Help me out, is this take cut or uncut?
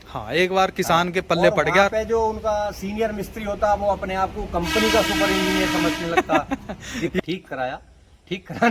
cut